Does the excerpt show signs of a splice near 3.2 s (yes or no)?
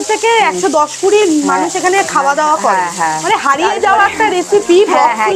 yes